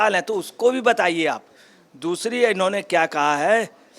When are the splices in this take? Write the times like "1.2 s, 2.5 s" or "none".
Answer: none